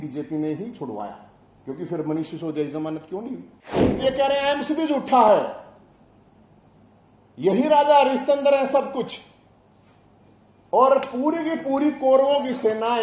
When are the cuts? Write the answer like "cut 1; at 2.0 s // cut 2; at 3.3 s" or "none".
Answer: cut 1; at 4.0 s

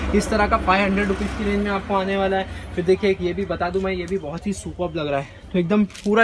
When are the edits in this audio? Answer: none

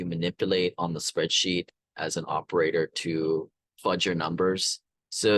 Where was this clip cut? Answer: none

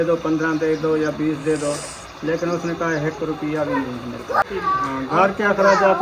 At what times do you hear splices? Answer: cut 1; at 4.9 s

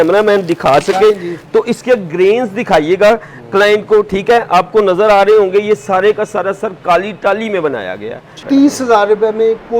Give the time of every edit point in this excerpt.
cut 1; at 8.3 s

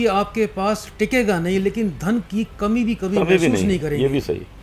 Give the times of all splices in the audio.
none

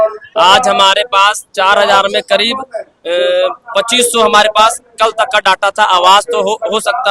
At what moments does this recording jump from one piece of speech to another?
none

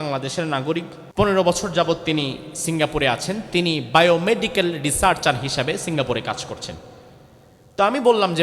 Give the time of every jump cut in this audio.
cut 1; at 1.0 s

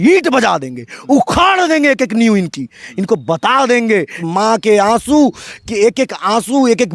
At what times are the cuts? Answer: cut 1; at 4.2 s

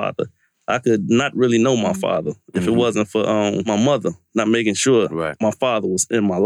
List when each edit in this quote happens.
cut 1; at 5.3 s

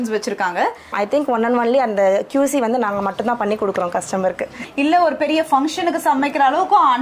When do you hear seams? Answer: cut 1; at 0.9 s // cut 2; at 4.6 s

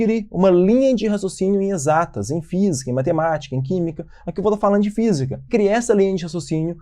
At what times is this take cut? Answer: cut 1; at 5.5 s

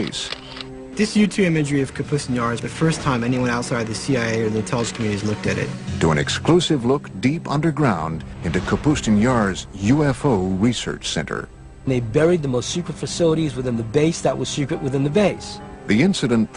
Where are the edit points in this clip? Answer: cut 1; at 12.7 s

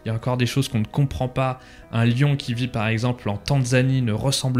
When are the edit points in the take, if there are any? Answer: none

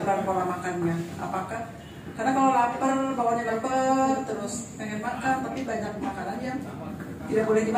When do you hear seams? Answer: none

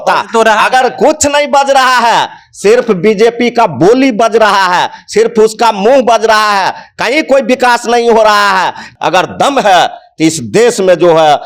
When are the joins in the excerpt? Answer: cut 1; at 8.9 s

